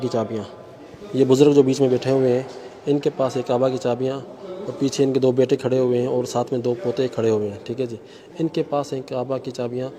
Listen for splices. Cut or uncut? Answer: uncut